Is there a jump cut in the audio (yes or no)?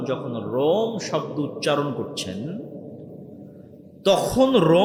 no